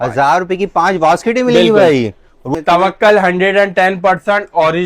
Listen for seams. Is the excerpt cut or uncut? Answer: cut